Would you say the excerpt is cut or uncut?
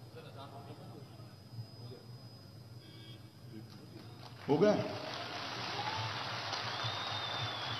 uncut